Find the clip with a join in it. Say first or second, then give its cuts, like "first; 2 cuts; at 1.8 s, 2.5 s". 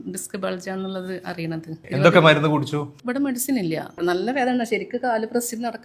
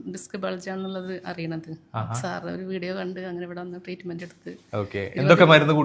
first; 2 cuts; at 1.8 s, 3.9 s